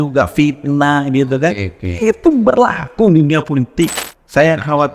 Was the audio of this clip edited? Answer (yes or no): yes